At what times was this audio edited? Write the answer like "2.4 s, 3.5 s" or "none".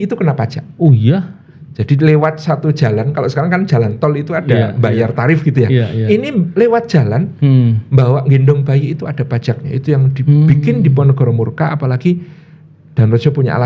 none